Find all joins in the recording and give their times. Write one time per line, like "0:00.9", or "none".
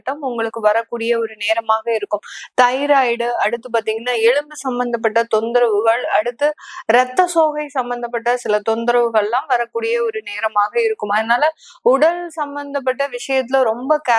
none

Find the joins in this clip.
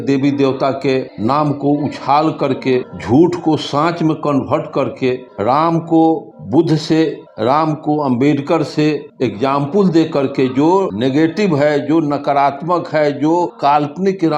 0:01.1
0:02.9
0:05.3
0:06.3
0:07.2
0:09.1
0:10.9
0:13.5

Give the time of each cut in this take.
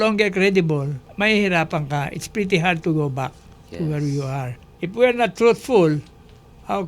0:01.0
0:04.6

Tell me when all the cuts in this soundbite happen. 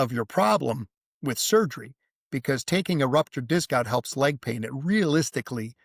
none

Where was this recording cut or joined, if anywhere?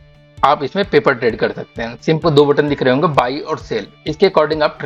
0:02.2

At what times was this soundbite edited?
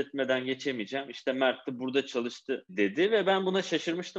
0:02.7

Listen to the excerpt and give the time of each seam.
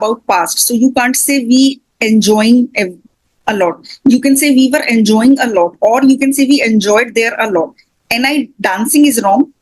none

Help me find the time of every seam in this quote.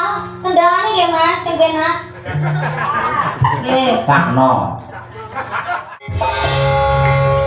0:06.1

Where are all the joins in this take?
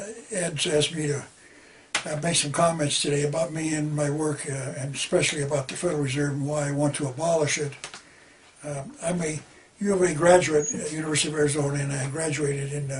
none

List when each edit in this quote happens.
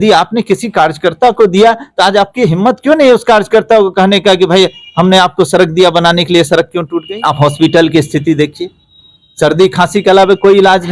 0:07.1

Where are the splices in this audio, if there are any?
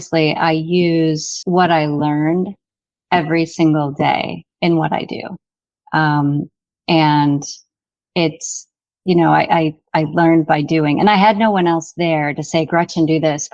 0:01.3

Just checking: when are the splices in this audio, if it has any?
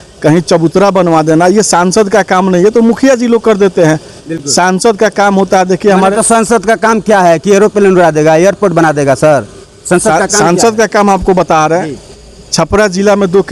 none

